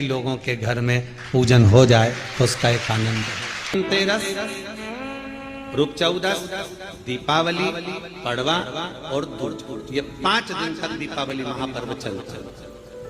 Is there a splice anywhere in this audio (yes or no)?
yes